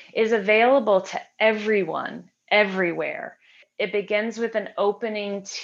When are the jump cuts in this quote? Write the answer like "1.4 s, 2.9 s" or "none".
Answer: 3.6 s

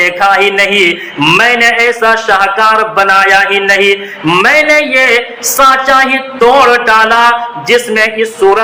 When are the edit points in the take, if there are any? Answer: none

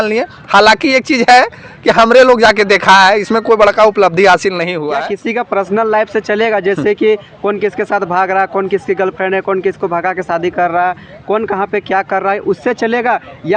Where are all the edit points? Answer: 4.8 s

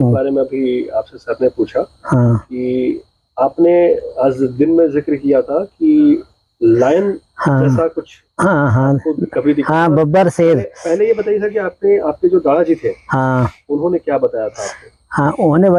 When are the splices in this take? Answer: none

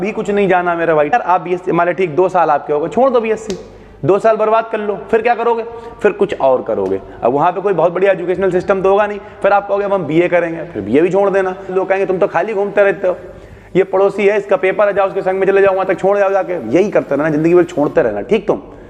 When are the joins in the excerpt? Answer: 1.1 s, 11.7 s

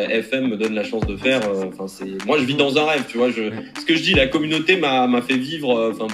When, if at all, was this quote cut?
none

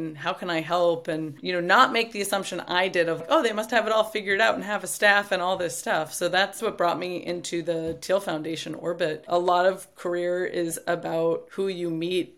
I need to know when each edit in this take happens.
3.2 s, 9.2 s, 11.5 s

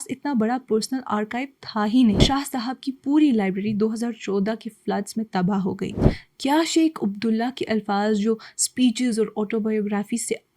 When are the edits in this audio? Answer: 2.2 s, 6.0 s

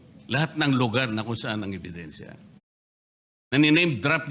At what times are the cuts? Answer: 3.1 s

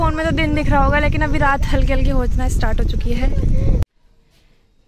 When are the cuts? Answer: 3.8 s

